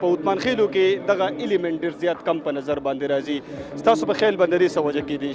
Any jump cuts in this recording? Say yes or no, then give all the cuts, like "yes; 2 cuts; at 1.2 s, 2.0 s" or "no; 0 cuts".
no; 0 cuts